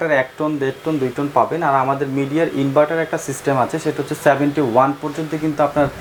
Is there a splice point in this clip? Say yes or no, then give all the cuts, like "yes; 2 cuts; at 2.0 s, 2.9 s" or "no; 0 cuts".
no; 0 cuts